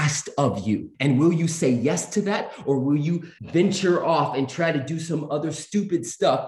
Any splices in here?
yes; 2 cuts; at 0.9 s, 3.3 s

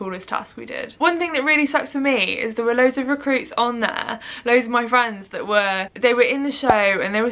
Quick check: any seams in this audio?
no; 0 cuts

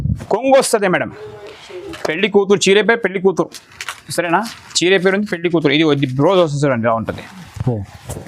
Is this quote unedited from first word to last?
no; 1 cut; at 1.8 s

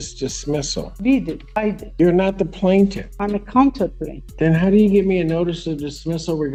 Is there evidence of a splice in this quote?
no; 0 cuts

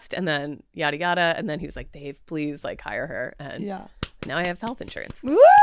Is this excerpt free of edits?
yes; 0 cuts

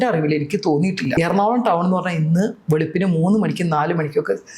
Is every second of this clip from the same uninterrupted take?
no; 1 cut; at 1.1 s

